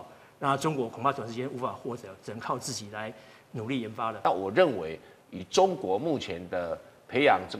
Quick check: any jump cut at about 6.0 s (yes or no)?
no